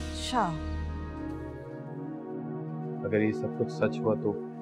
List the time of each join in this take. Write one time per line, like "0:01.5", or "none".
0:01.1